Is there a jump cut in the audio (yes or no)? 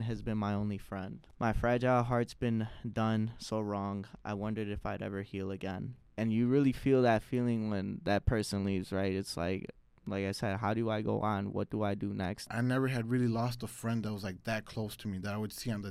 yes